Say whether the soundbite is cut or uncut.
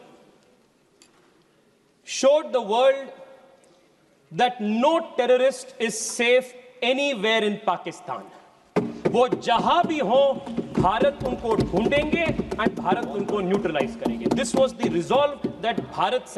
uncut